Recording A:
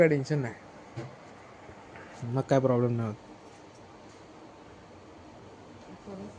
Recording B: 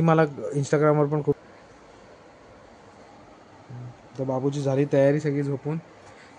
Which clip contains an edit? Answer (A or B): B